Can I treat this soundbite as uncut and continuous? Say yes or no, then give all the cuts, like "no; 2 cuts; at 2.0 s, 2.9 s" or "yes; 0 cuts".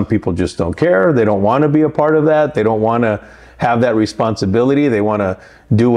yes; 0 cuts